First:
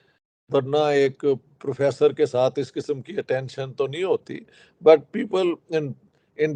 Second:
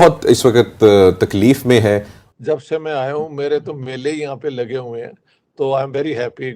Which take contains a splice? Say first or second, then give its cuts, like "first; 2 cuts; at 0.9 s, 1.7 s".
second; 1 cut; at 2.2 s